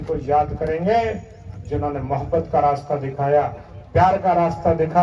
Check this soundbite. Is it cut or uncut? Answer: uncut